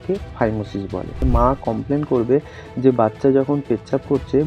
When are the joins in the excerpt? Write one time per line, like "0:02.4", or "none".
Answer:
0:01.2